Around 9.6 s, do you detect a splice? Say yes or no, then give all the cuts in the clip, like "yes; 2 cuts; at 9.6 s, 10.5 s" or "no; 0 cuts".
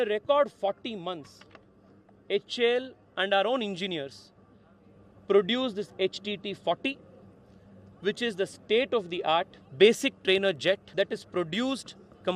yes; 2 cuts; at 9.6 s, 10.9 s